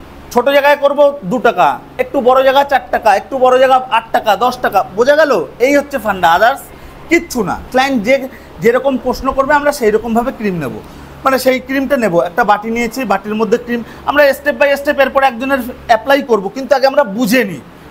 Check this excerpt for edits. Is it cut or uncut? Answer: cut